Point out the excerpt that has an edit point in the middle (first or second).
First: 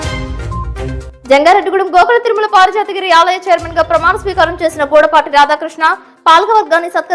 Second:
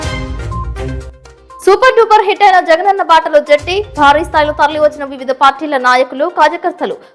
second